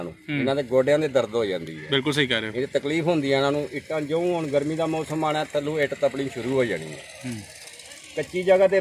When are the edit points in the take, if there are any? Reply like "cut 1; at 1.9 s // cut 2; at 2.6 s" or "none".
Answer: none